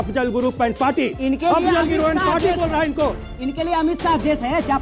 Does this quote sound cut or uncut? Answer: uncut